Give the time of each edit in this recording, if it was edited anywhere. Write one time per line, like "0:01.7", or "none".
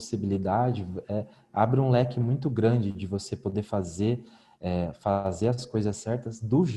none